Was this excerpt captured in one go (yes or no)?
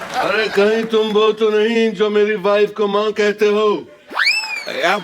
yes